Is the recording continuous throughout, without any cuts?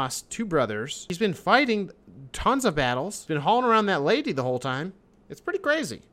no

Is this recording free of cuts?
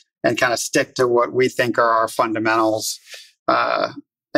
yes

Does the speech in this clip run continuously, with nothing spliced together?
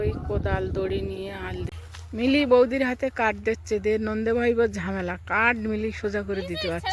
no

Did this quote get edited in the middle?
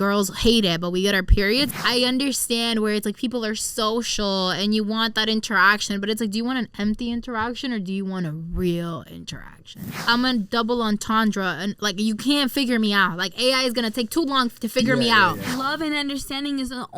yes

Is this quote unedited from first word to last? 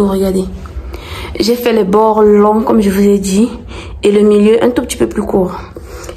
yes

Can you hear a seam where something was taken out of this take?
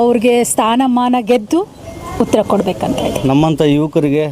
yes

